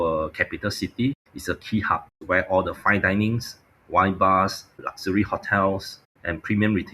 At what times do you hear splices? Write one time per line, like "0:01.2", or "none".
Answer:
0:01.3
0:02.1